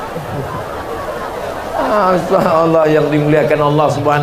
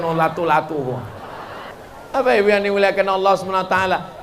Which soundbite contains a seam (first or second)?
second